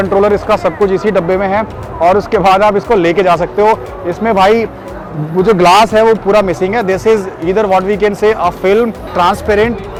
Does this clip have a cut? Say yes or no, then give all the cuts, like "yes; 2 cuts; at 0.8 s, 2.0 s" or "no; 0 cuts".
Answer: no; 0 cuts